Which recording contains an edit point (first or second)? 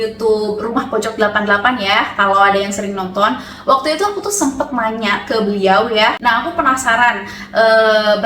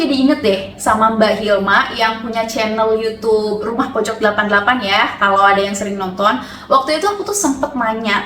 first